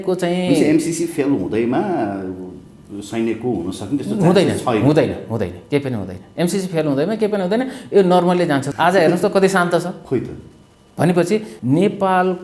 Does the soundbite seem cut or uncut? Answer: cut